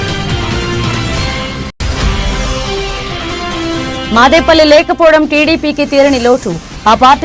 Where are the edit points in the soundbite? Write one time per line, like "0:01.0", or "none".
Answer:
0:03.5

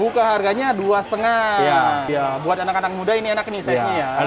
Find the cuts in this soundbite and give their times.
0:02.1

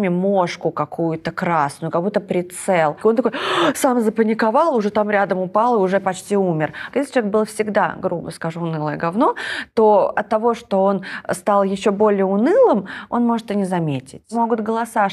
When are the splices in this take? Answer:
0:03.0
0:06.8
0:14.3

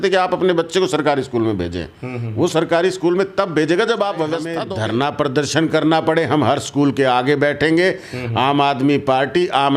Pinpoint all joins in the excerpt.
0:04.6

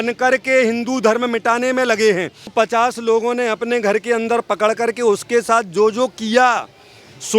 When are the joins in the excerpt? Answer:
0:02.5

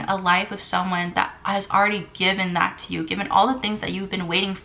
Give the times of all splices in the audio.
none

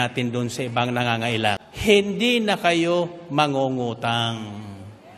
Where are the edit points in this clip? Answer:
0:01.6

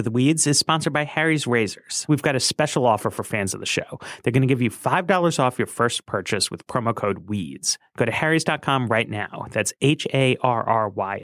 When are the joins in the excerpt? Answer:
0:02.0

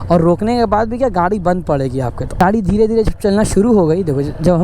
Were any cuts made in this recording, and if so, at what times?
0:02.4

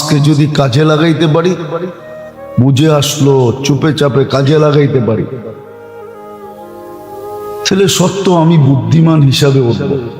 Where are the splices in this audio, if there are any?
0:05.5
0:07.1

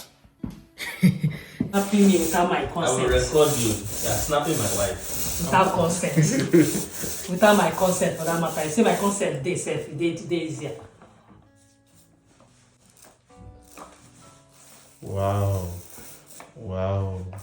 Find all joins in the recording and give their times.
0:01.7

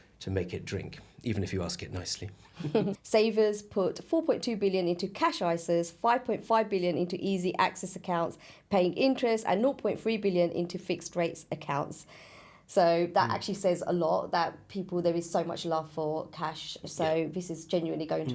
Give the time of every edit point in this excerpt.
0:03.0

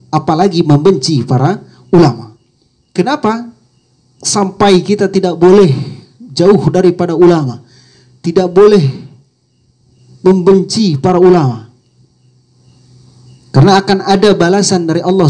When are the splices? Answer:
none

